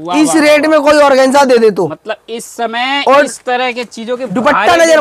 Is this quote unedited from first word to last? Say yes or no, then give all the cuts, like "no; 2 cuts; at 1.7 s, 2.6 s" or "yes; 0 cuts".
yes; 0 cuts